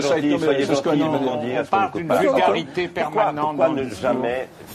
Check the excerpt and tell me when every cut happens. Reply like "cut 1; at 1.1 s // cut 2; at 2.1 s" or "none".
cut 1; at 1.1 s